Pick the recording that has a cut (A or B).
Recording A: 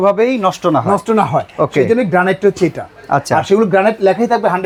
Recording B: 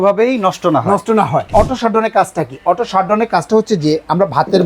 B